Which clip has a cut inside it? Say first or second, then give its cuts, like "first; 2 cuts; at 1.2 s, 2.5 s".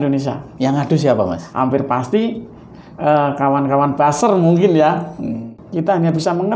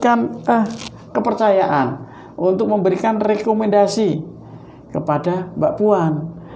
first; 2 cuts; at 1.4 s, 5.4 s